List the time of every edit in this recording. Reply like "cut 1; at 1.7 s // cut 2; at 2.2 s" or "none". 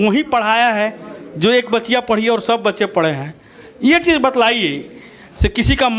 none